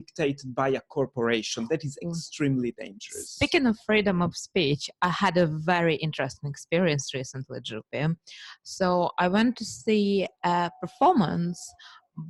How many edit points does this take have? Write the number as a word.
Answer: zero